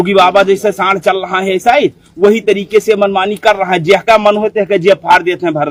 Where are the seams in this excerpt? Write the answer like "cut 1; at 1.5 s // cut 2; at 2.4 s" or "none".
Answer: none